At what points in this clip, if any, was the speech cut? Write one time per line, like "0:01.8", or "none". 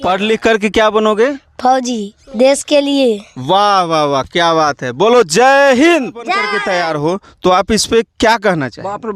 0:06.5